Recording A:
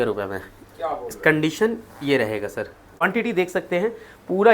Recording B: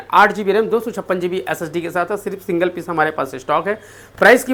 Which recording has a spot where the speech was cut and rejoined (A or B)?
A